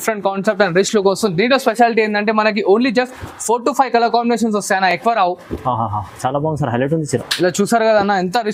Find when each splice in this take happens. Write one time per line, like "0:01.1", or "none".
none